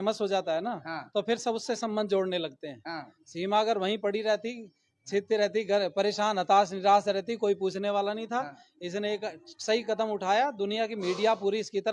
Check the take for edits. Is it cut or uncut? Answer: uncut